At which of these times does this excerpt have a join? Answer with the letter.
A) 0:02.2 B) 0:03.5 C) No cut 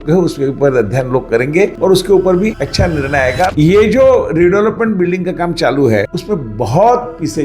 B